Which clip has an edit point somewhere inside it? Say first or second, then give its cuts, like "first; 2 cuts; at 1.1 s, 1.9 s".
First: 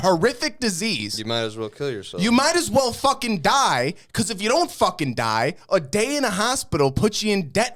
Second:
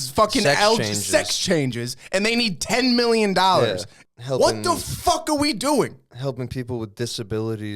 second; 1 cut; at 3.9 s